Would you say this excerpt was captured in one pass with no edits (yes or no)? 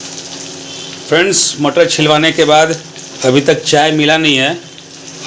yes